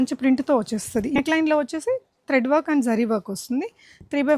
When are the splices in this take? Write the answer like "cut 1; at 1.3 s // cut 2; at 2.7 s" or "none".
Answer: cut 1; at 1.2 s